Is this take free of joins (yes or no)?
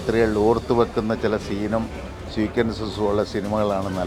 yes